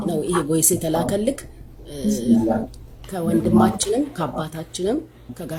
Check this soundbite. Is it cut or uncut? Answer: uncut